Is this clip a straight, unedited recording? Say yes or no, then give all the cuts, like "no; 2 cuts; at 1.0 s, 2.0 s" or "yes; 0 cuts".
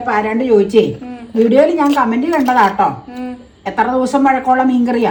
yes; 0 cuts